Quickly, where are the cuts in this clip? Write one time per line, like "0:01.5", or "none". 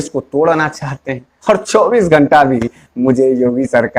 0:01.3